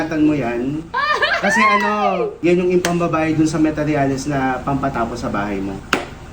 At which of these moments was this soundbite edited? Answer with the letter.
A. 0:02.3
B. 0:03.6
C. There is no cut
A